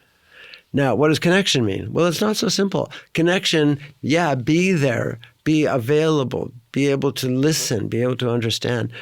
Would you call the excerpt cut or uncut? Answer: uncut